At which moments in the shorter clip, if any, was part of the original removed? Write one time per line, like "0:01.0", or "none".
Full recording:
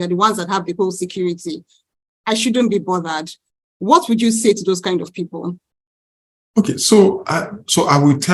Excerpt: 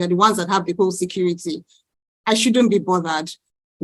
none